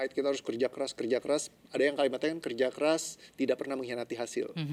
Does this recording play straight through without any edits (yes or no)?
yes